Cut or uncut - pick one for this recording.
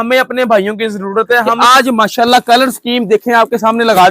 cut